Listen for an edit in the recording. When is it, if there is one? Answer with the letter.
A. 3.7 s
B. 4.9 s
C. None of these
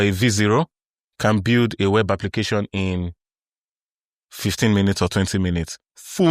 C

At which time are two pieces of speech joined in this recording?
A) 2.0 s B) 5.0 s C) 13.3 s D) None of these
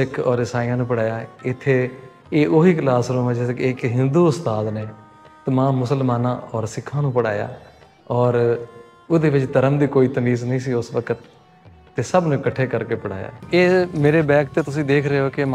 C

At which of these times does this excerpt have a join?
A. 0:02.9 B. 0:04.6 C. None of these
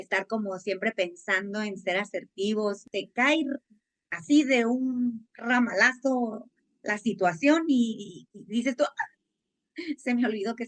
A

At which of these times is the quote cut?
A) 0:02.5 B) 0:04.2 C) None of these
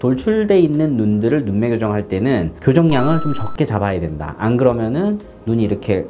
A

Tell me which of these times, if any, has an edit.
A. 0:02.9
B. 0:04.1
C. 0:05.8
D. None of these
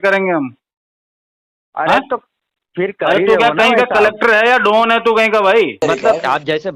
C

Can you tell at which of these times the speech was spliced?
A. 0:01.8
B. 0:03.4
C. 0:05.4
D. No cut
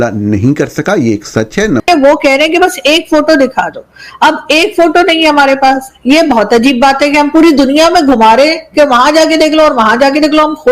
A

